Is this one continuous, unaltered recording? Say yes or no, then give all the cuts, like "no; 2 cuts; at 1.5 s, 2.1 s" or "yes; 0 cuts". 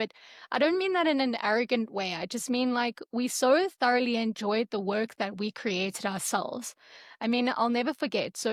yes; 0 cuts